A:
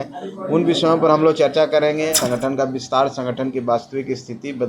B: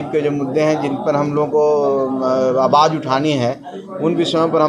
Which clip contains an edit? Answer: A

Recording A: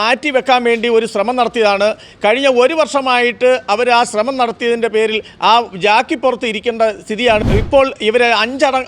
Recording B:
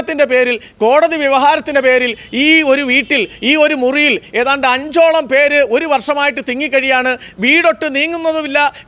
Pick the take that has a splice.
A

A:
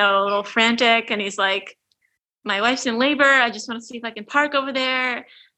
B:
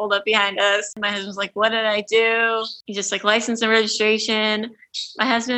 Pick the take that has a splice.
B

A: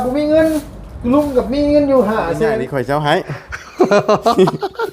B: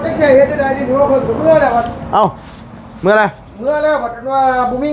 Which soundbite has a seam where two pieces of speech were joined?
A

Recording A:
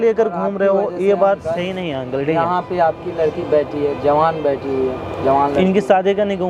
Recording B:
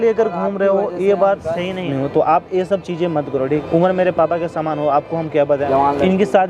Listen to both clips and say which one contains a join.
B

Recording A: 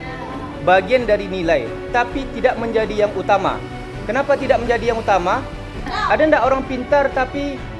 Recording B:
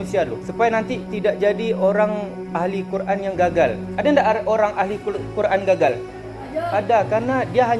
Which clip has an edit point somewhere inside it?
B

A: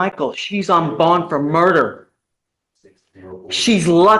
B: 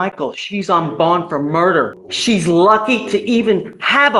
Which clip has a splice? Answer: B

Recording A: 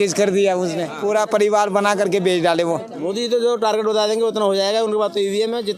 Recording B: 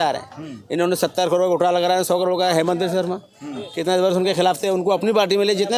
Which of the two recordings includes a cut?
A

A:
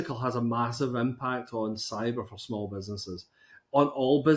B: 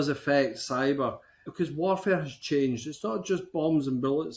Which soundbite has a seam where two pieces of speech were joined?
B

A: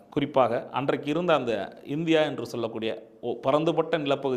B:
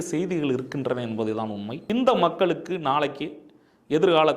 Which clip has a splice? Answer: B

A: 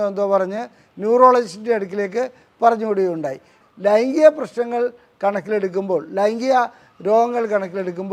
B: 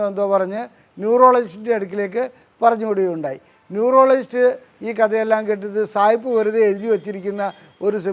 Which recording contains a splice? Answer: A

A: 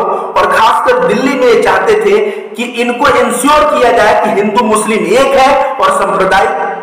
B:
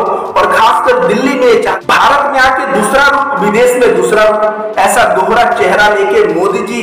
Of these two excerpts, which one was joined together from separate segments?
B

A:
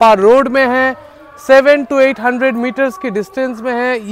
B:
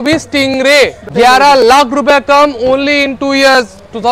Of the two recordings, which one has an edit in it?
B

